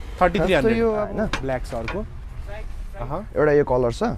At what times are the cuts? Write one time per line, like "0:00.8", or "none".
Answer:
0:01.1